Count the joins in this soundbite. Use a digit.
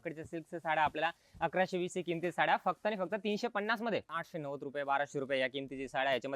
1